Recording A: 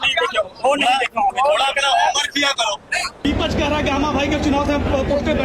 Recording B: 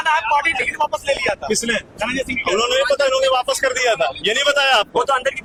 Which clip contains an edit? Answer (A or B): A